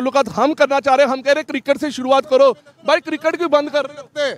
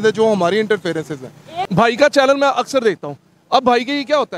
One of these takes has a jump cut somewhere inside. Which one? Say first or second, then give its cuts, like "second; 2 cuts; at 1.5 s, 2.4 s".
second; 1 cut; at 1.5 s